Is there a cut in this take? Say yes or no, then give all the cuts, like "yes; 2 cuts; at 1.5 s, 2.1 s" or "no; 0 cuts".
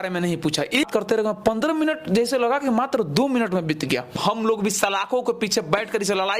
yes; 2 cuts; at 0.9 s, 4.2 s